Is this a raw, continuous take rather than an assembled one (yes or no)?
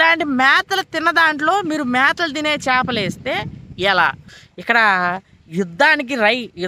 no